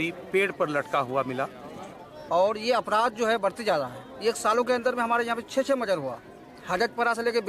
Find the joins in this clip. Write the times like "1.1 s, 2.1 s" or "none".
2.2 s